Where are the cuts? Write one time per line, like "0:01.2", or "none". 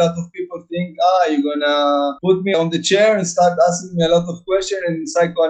none